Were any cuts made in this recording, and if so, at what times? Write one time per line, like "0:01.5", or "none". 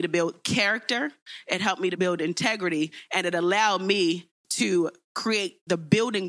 0:01.9